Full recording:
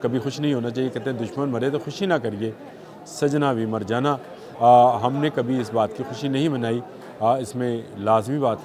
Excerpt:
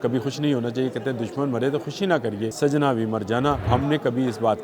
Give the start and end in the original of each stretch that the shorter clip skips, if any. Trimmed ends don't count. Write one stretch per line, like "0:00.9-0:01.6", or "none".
0:02.5-0:03.1
0:04.3-0:05.0

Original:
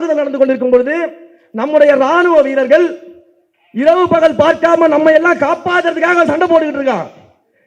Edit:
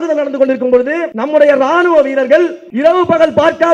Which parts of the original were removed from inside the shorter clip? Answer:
0:01.1-0:01.5
0:03.0-0:03.7

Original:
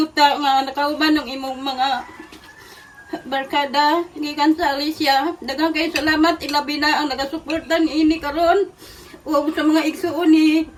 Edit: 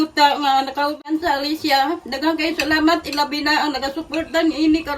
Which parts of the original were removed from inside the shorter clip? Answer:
0:01.0-0:04.3

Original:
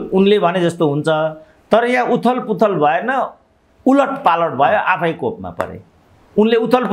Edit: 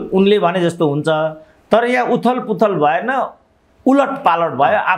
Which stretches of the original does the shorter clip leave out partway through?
none

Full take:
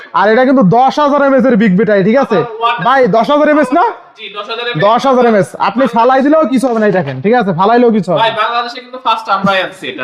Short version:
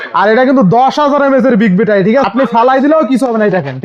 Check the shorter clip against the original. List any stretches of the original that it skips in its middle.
0:02.3-0:05.7

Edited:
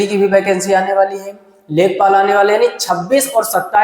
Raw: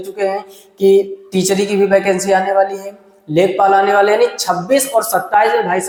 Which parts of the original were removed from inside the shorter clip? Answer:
none

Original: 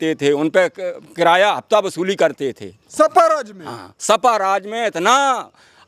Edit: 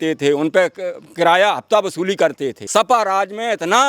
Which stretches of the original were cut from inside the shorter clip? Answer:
0:02.5-0:03.9

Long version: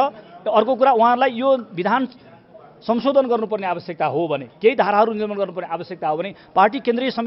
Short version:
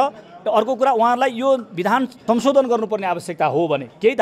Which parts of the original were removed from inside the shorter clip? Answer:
0:02.1-0:02.7

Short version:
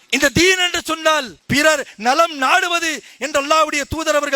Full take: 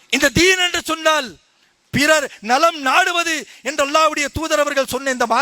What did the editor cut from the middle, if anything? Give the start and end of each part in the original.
0:01.3-0:01.8

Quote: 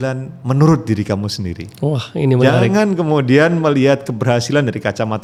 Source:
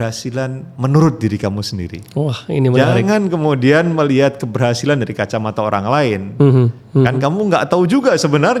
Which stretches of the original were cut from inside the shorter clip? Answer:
none

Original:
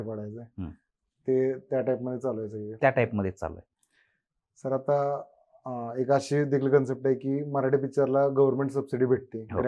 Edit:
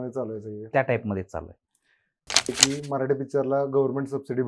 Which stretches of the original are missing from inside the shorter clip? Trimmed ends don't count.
0:04.6-0:07.1

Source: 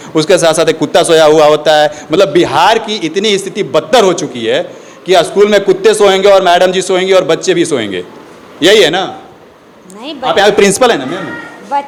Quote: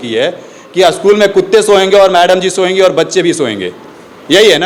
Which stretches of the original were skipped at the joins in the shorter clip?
none

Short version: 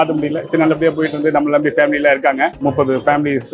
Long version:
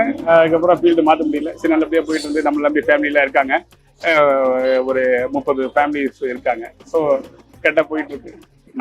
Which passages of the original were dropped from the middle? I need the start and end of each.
0:03.7-0:05.3

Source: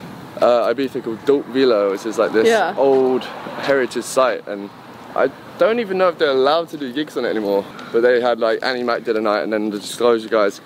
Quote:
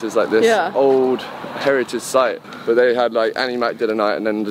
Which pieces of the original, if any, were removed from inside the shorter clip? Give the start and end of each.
0:04.5-0:07.8

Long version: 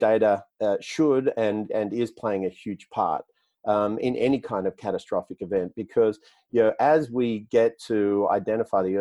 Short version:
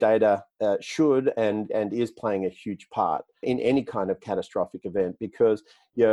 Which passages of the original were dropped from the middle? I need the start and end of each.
0:03.4-0:04.0

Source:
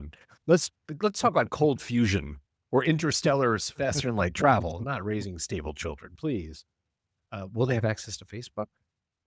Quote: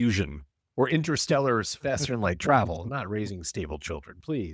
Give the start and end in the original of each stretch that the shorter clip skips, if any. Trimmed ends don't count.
none

